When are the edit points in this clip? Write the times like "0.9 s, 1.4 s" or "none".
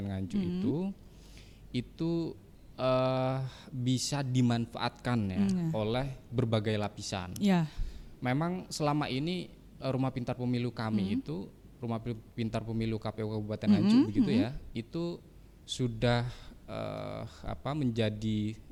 none